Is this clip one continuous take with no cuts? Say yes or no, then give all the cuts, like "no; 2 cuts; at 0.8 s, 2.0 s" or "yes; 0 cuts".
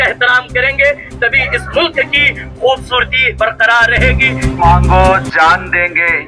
no; 1 cut; at 4.5 s